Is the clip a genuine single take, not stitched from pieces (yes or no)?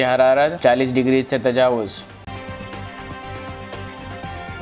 yes